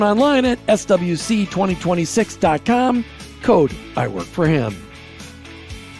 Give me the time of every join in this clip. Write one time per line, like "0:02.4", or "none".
0:04.8